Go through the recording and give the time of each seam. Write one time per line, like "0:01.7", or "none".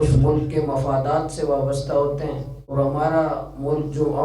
0:02.7